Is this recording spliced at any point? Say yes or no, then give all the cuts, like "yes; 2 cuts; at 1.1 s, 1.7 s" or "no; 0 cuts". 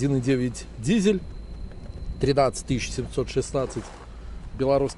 no; 0 cuts